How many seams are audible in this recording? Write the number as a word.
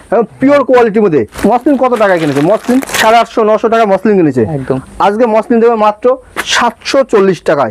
two